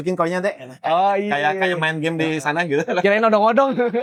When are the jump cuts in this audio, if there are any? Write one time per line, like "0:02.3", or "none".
none